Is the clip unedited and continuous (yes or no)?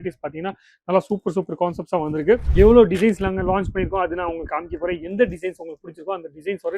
no